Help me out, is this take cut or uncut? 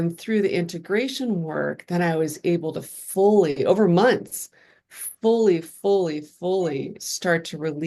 uncut